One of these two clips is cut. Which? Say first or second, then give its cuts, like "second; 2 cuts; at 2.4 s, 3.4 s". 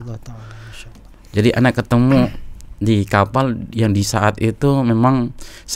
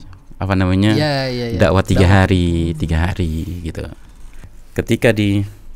second; 1 cut; at 4.6 s